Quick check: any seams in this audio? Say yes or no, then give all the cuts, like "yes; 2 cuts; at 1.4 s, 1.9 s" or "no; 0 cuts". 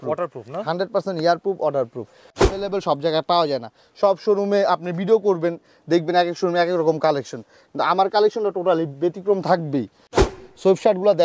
yes; 2 cuts; at 2.3 s, 10.3 s